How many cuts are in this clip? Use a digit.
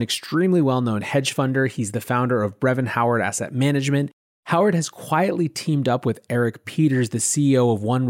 1